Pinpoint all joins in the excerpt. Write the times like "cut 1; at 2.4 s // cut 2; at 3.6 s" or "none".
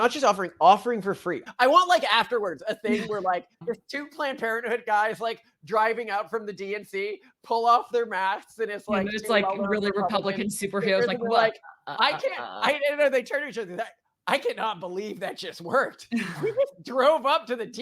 cut 1; at 1.4 s // cut 2; at 3.5 s

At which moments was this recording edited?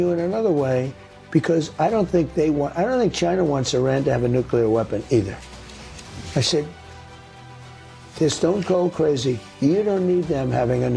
none

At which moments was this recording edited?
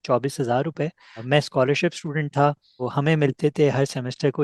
cut 1; at 1.2 s // cut 2; at 2.9 s

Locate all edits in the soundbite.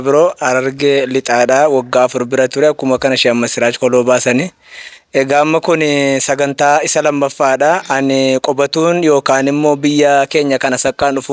none

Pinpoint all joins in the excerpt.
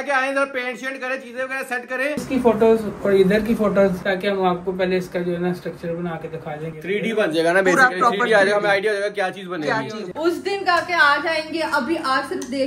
cut 1; at 2.2 s // cut 2; at 4.0 s // cut 3; at 6.7 s // cut 4; at 10.0 s

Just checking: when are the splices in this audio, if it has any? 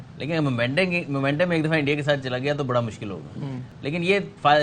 none

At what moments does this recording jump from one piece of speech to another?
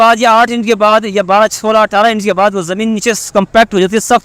none

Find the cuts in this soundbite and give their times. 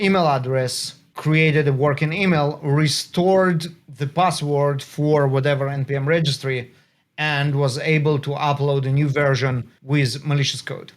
cut 1; at 1.1 s // cut 2; at 9.7 s

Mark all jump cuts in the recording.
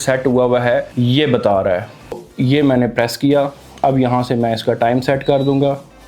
cut 1; at 0.9 s // cut 2; at 2.3 s

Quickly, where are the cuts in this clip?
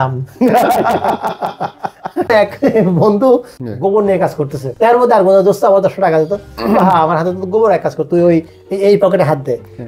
cut 1; at 2.3 s // cut 2; at 3.6 s // cut 3; at 4.7 s

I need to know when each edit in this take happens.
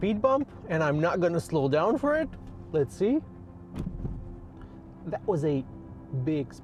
none

